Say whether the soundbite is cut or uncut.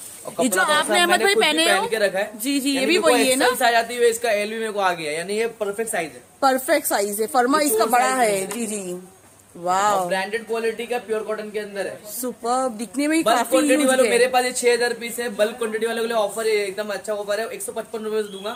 uncut